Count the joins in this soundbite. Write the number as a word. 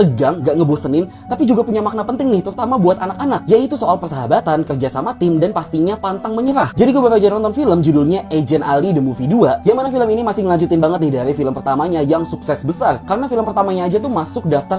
zero